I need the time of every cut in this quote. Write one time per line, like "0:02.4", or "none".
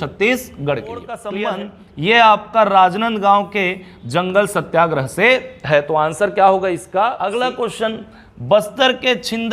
0:01.3
0:07.2